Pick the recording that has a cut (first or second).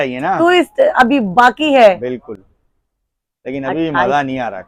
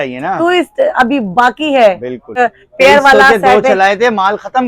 second